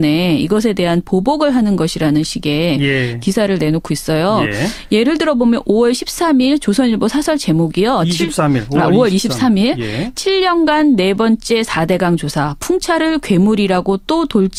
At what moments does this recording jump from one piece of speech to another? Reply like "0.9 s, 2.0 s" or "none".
none